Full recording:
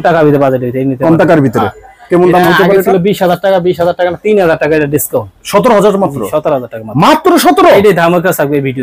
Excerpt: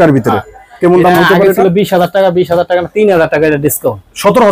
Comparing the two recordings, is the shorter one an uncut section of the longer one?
yes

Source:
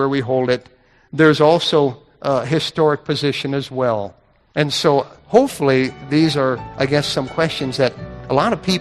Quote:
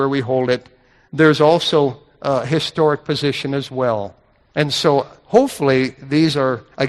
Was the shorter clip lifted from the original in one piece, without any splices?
yes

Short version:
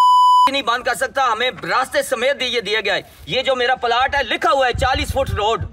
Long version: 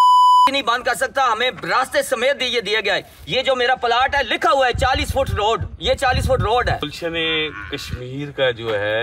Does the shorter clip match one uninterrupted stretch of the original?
yes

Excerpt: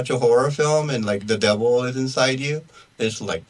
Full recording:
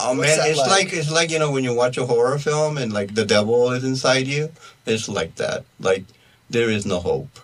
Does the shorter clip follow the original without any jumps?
yes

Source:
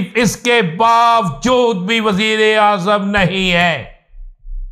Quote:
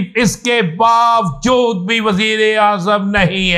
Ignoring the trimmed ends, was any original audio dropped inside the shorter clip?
no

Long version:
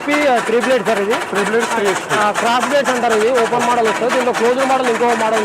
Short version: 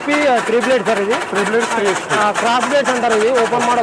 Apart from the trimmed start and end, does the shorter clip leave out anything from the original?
no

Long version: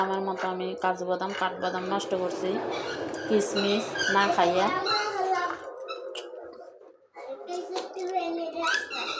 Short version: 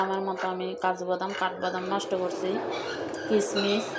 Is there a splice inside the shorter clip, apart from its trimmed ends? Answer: no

